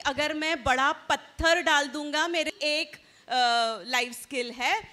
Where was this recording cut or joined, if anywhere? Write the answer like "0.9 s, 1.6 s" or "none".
2.5 s